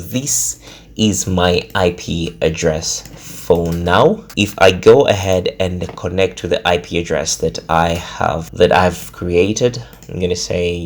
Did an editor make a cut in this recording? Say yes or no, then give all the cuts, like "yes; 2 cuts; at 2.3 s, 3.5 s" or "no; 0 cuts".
yes; 2 cuts; at 4.3 s, 8.5 s